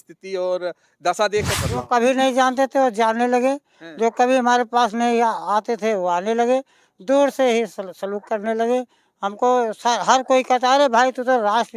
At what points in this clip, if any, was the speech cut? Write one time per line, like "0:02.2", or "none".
0:01.6